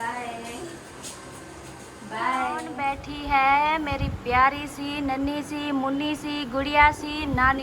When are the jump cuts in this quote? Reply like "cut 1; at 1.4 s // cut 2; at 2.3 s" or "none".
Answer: cut 1; at 2.7 s